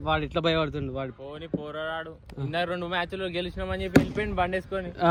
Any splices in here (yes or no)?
no